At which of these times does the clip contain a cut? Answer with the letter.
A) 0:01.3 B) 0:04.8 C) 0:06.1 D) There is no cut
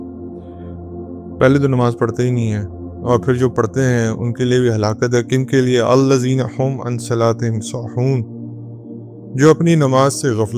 A